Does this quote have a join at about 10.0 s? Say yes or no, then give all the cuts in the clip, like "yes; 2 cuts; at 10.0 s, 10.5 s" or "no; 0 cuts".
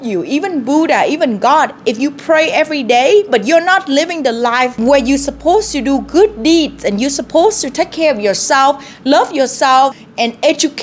yes; 2 cuts; at 4.7 s, 10.0 s